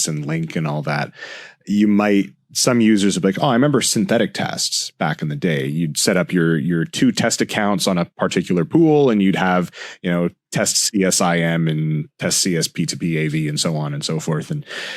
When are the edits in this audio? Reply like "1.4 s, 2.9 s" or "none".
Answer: none